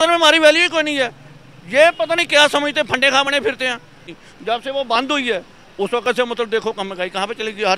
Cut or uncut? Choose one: cut